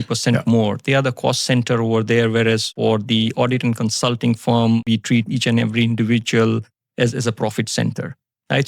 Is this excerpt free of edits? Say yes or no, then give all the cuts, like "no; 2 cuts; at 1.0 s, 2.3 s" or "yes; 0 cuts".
no; 2 cuts; at 2.7 s, 4.8 s